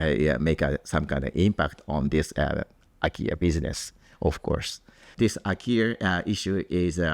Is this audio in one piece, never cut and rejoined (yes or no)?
no